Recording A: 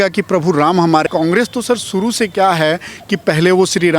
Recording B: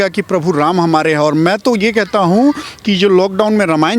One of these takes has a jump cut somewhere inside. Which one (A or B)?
A